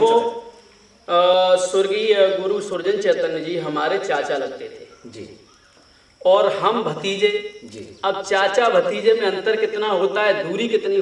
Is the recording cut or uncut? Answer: uncut